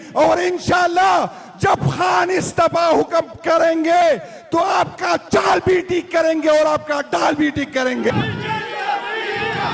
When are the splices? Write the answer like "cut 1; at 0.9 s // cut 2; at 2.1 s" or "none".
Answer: cut 1; at 8.1 s